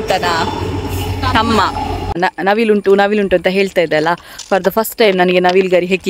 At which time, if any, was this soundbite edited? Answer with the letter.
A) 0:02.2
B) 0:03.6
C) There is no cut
A